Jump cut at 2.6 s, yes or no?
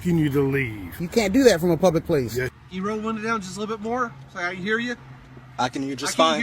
yes